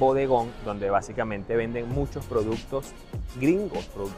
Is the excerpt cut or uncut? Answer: uncut